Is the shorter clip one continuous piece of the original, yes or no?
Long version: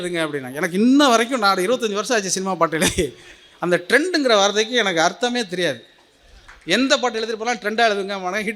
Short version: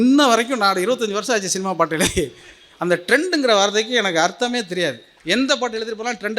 no